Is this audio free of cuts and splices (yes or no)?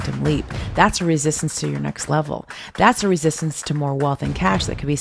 yes